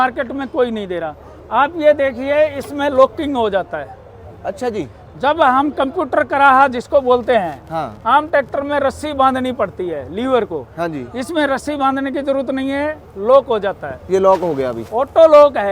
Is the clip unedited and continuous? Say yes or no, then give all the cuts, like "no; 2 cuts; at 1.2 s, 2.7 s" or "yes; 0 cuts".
yes; 0 cuts